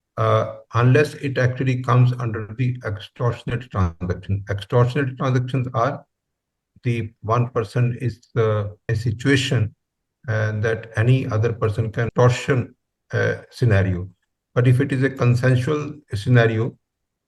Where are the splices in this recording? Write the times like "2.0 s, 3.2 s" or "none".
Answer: 8.9 s, 12.1 s